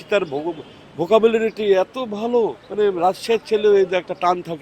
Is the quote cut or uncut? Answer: cut